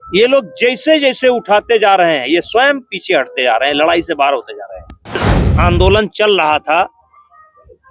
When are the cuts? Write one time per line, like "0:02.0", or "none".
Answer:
0:05.4